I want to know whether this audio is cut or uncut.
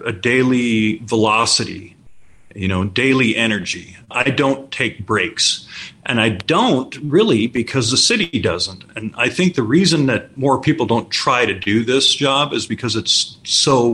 cut